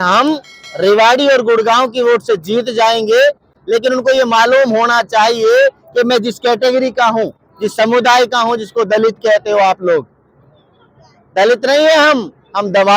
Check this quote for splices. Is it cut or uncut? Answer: uncut